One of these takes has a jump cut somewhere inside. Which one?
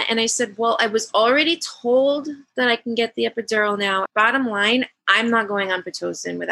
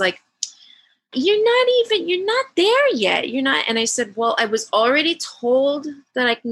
first; 1 cut; at 4.1 s

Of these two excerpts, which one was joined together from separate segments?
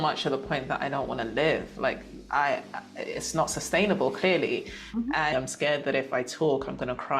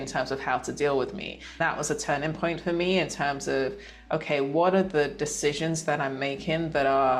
first; 1 cut; at 5.3 s

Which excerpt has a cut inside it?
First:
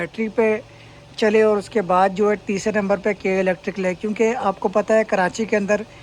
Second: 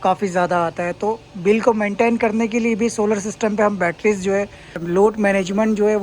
second; 1 cut; at 4.8 s

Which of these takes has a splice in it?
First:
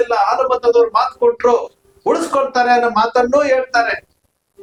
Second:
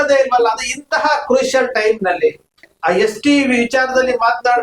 second; 1 cut; at 2.7 s

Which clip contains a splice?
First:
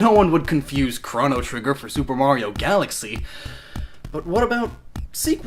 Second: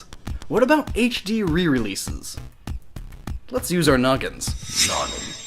second; 1 cut; at 1.4 s

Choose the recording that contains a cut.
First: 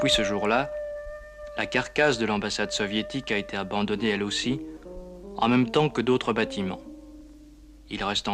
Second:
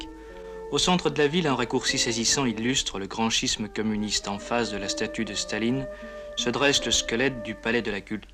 first; 1 cut; at 6.5 s

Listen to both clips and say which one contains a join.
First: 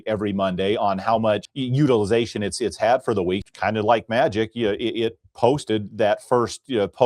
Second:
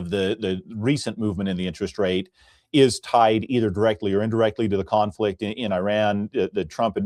first; 2 cuts; at 1.6 s, 3.4 s

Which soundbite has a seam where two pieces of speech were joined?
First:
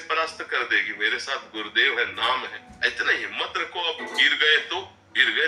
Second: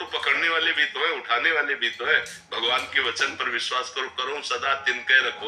first; 1 cut; at 2.6 s

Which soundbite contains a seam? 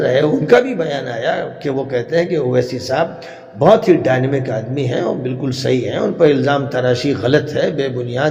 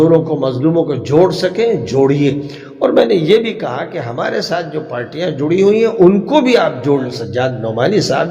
second; 1 cut; at 7.2 s

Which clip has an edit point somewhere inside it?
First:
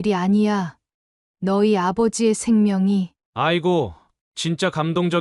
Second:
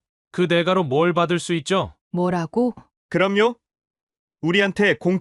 second; 2 cuts; at 2.0 s, 2.9 s

